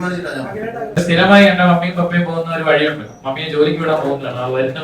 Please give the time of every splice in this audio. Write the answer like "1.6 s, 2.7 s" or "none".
1.0 s